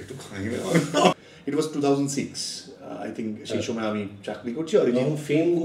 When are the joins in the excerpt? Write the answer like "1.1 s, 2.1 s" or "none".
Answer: 1.2 s